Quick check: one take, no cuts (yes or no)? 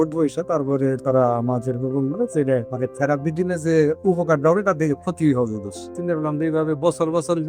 no